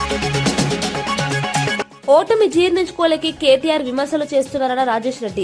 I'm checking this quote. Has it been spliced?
yes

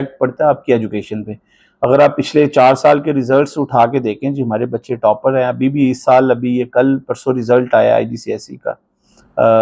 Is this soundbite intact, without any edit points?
yes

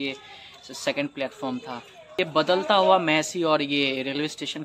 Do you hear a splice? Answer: yes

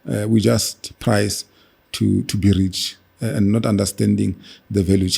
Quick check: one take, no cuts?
yes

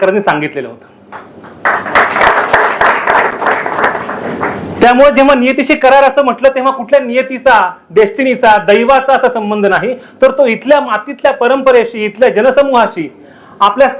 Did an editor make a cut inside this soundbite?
no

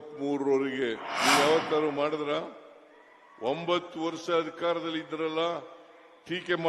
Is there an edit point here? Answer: yes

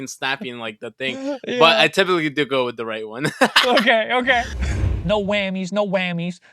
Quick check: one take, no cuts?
no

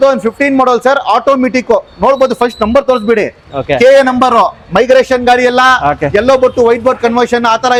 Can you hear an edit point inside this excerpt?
no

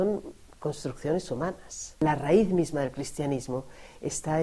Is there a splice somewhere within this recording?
yes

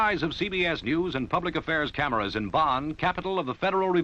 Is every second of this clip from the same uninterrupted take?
yes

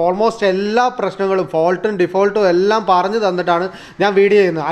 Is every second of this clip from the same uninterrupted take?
yes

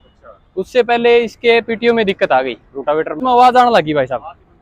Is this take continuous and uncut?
no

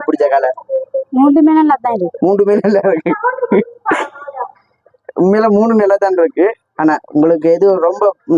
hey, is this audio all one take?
yes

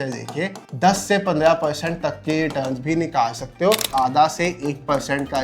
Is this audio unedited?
no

